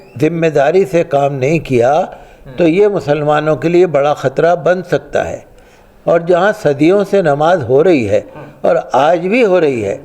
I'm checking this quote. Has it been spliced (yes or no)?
no